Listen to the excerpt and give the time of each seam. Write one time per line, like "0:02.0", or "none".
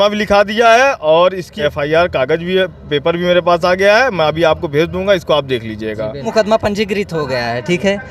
0:01.5
0:06.3